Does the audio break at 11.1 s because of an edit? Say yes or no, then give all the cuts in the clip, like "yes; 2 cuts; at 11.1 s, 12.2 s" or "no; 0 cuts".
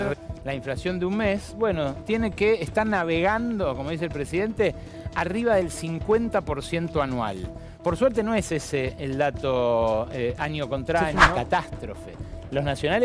yes; 1 cut; at 11.1 s